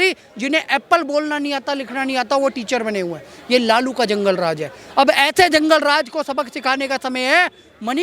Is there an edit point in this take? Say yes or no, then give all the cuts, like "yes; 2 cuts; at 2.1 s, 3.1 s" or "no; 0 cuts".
no; 0 cuts